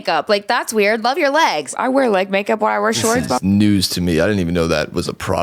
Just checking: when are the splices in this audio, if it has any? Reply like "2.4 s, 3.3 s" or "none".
1.7 s, 3.4 s